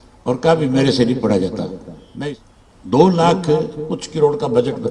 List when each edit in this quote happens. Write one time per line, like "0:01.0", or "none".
0:02.2